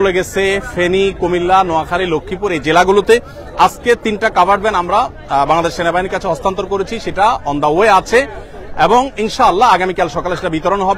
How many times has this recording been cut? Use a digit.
0